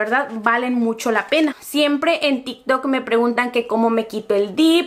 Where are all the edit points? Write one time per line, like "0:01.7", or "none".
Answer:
0:01.9